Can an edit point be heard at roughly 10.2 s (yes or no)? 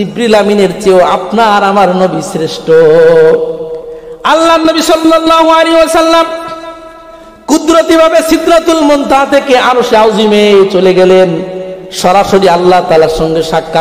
no